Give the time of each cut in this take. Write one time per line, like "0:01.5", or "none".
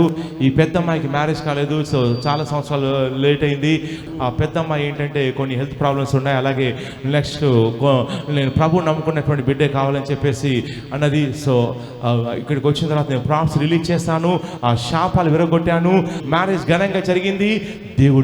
0:04.0
0:16.2